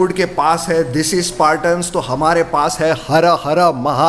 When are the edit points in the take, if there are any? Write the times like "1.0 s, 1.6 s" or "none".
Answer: none

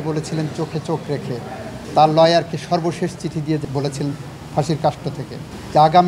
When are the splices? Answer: 1.7 s, 3.6 s

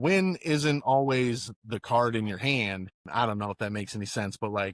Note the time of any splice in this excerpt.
2.9 s

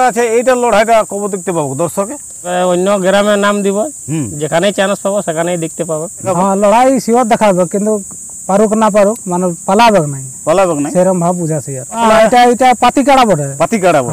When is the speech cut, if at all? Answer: 2.5 s, 6.3 s, 12.0 s

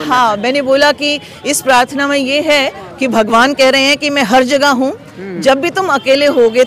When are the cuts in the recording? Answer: none

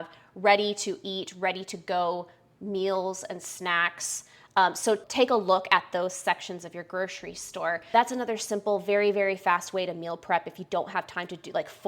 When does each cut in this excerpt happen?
5.1 s, 7.9 s

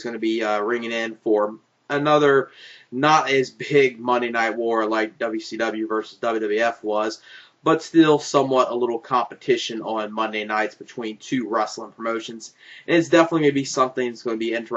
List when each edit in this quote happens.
11.9 s

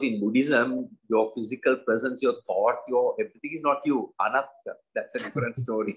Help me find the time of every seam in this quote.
none

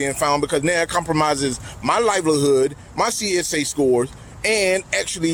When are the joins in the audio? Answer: none

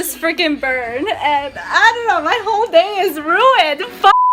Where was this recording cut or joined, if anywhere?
none

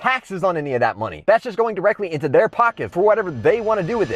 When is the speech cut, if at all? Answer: 2.8 s

